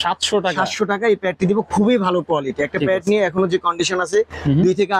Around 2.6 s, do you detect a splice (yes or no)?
no